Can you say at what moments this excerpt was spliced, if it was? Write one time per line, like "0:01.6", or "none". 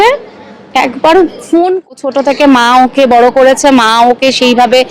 0:01.9

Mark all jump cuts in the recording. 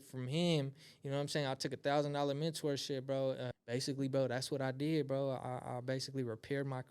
0:03.5

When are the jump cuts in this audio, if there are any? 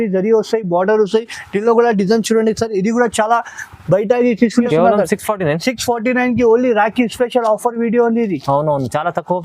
0:04.7

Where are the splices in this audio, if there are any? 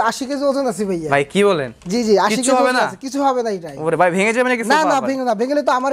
none

